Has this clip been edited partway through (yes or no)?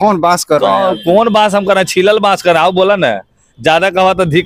no